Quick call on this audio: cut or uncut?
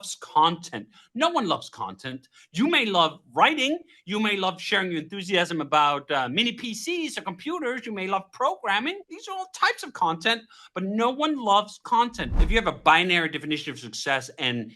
cut